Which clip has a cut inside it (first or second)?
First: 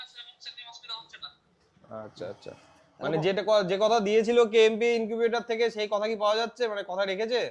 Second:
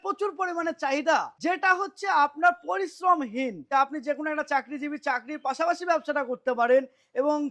second